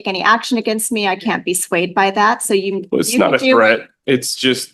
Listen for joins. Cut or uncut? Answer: uncut